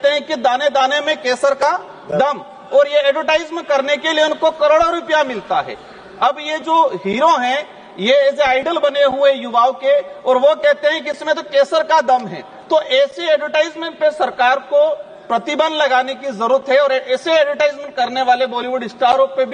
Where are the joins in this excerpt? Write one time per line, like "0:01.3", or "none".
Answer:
none